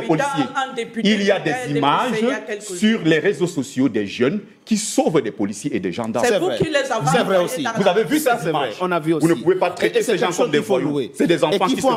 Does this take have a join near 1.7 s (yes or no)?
no